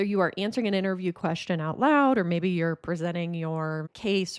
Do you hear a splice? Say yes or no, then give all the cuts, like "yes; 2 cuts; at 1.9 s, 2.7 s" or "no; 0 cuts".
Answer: no; 0 cuts